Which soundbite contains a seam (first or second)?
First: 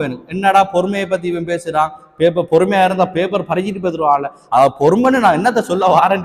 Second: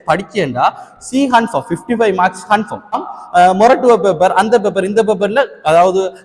second